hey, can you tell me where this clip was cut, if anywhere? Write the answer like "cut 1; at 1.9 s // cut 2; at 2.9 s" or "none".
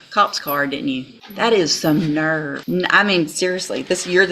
cut 1; at 1.2 s // cut 2; at 2.6 s